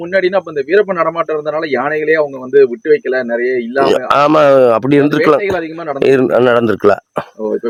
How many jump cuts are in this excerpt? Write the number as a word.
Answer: zero